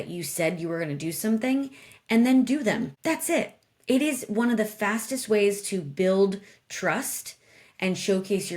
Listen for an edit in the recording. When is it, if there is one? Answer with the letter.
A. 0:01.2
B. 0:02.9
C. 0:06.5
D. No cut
B